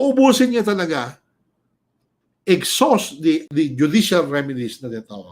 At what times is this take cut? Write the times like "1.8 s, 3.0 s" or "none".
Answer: 3.5 s